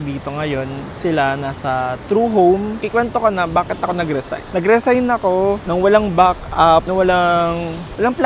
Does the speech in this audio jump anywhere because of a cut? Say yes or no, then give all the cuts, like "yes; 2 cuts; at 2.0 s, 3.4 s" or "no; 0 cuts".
yes; 1 cut; at 2.8 s